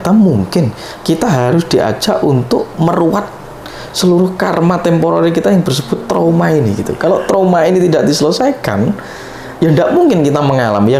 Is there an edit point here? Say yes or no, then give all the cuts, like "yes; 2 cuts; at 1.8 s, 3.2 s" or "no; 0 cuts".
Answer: no; 0 cuts